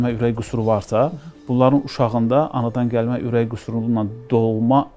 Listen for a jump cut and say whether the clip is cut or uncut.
uncut